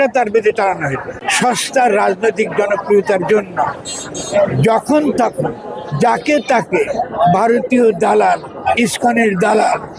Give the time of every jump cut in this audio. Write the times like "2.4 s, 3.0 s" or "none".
1.2 s